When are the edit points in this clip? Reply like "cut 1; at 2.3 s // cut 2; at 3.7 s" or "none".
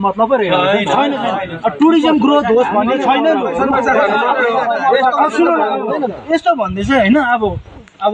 none